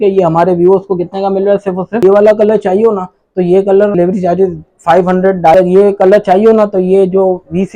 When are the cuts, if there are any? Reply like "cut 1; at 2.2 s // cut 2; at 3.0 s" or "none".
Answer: cut 1; at 2.0 s // cut 2; at 3.9 s // cut 3; at 5.5 s